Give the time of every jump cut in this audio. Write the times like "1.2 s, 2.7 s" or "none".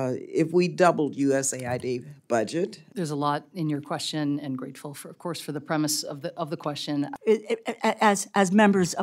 2.9 s, 7.1 s